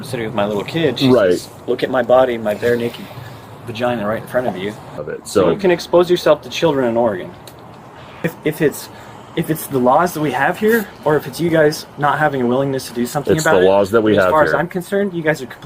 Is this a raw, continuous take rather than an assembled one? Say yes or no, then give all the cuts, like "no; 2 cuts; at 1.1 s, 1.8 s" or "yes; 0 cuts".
no; 2 cuts; at 4.9 s, 8.2 s